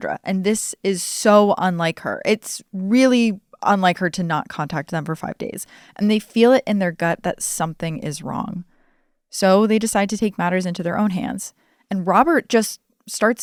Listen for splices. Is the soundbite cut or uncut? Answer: uncut